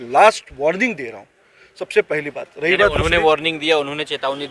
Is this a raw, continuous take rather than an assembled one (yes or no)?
yes